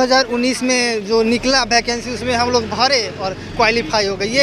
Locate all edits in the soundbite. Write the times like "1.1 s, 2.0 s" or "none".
none